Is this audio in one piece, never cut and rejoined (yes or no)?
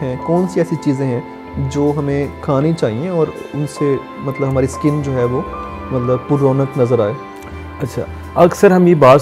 yes